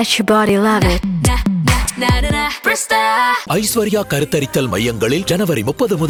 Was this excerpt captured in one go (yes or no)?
yes